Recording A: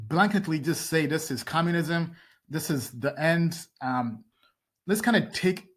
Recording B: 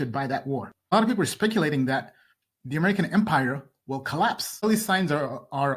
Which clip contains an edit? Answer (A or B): B